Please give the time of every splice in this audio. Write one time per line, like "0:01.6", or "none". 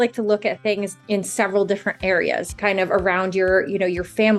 0:00.9
0:02.4